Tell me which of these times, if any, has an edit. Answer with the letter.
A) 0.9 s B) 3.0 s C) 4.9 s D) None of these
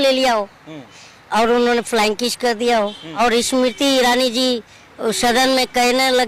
B